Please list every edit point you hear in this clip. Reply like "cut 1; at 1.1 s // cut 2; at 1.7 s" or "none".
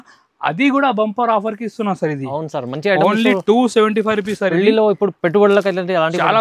none